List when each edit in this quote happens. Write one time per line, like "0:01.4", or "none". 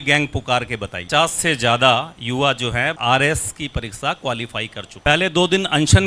0:01.0
0:05.0

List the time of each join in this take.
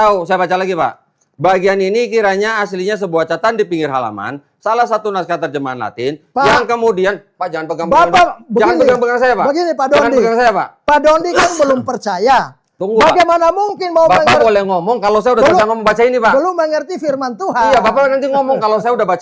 none

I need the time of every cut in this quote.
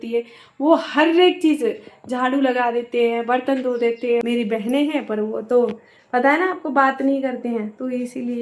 0:04.2

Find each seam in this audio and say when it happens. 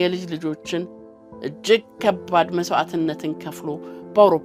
none

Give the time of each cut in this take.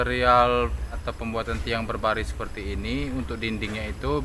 0:00.9

